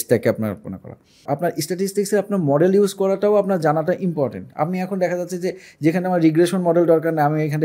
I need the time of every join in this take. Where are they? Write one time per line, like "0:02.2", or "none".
0:01.2